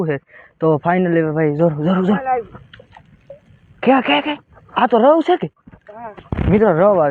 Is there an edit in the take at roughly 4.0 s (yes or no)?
no